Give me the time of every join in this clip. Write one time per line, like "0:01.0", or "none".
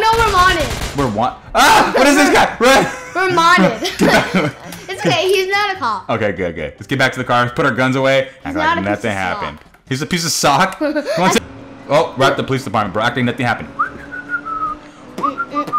0:11.4